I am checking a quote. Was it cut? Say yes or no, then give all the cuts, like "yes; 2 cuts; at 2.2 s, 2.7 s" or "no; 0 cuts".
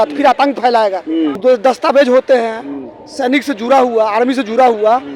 yes; 1 cut; at 1.4 s